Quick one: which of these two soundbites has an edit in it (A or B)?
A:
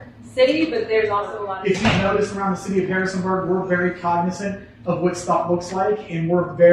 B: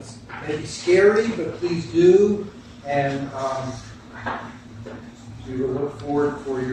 A